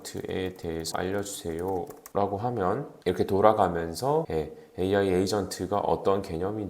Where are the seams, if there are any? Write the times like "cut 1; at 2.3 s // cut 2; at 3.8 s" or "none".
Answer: cut 1; at 0.9 s // cut 2; at 2.0 s // cut 3; at 2.9 s // cut 4; at 4.3 s